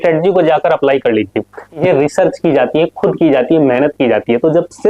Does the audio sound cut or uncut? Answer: cut